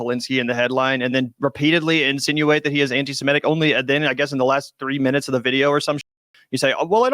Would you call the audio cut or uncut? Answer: cut